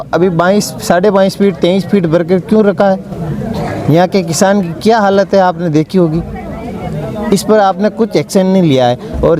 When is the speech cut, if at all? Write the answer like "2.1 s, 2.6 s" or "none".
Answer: none